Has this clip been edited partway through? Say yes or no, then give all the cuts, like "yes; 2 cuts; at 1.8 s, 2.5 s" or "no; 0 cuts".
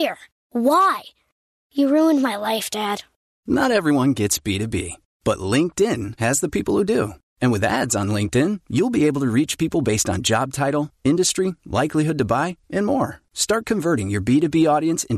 no; 0 cuts